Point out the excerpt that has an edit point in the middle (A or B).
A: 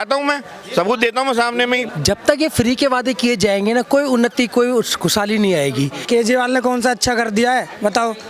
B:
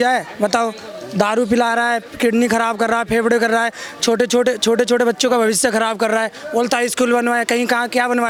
A